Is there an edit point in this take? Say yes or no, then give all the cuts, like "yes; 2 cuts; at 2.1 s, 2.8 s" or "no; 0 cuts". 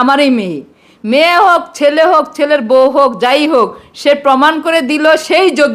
no; 0 cuts